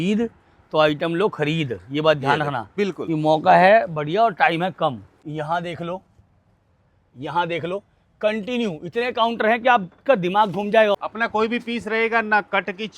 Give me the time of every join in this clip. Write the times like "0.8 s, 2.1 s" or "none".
5.1 s, 11.0 s